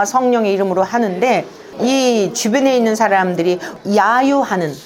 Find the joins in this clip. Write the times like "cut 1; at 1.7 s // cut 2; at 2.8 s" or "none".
cut 1; at 3.7 s